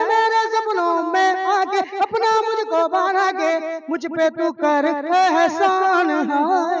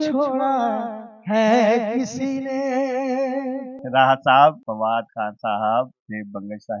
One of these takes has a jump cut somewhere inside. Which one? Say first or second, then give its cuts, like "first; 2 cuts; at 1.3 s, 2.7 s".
second; 2 cuts; at 3.8 s, 4.7 s